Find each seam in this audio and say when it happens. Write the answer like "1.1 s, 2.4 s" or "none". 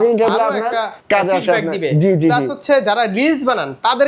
1.0 s